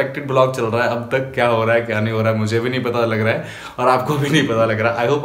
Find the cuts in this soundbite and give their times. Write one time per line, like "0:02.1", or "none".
none